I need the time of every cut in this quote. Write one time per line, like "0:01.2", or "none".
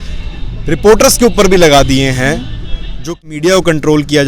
0:03.2